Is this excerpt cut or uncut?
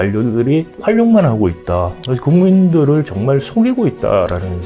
uncut